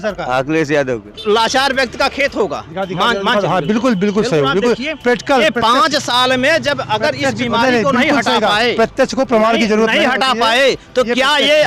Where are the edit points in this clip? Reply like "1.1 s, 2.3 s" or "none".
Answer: 1.1 s